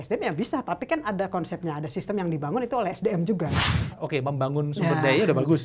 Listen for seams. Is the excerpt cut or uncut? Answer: cut